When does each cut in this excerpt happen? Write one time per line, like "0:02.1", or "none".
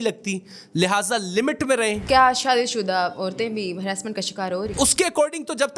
0:02.0
0:04.7

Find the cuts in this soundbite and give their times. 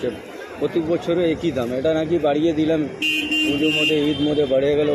none

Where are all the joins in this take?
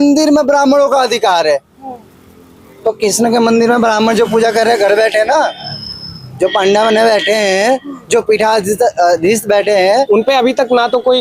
0:10.1

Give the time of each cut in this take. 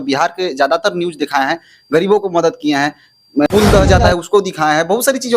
0:03.5

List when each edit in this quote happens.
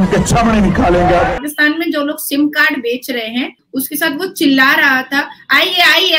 0:01.4
0:03.5

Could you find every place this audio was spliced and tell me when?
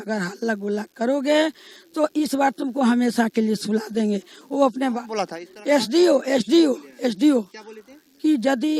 none

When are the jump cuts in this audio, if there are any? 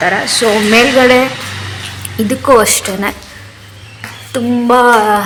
none

